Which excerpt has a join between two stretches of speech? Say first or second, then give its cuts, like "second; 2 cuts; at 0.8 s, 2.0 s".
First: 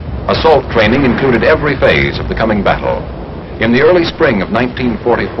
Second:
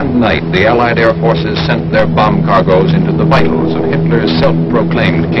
first; 1 cut; at 2.6 s